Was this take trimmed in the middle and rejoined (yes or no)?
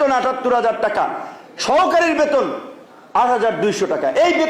no